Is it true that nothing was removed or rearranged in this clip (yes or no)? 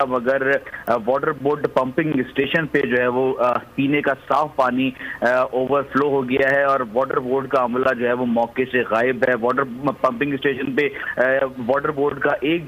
yes